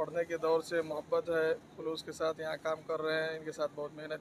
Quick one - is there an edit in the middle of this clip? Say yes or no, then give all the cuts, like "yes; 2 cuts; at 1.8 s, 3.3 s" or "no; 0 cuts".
no; 0 cuts